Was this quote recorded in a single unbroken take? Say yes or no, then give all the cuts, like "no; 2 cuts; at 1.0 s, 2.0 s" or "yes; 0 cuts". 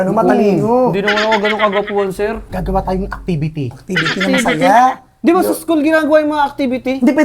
no; 1 cut; at 2.4 s